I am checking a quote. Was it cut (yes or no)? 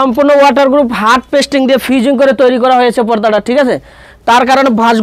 no